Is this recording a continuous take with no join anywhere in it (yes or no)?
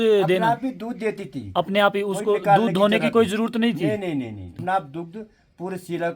no